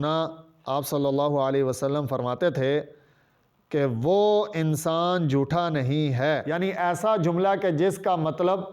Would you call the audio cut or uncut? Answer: cut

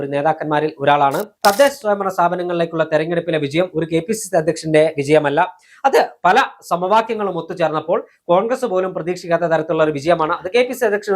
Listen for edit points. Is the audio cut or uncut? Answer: cut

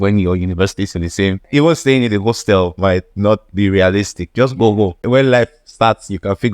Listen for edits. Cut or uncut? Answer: cut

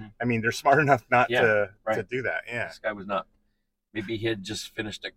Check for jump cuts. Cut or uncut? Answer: uncut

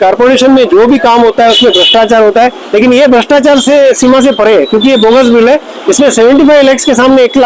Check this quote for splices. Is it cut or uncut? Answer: uncut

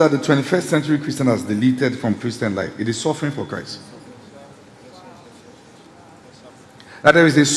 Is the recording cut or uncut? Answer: uncut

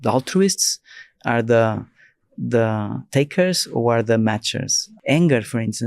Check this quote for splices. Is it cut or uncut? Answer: cut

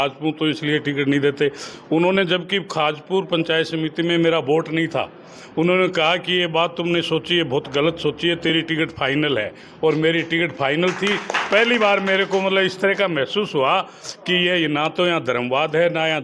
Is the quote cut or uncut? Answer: uncut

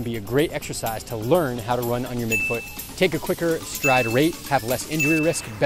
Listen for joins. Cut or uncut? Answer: uncut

